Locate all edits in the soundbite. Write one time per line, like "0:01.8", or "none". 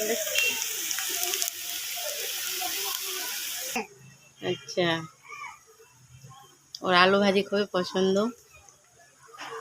0:03.8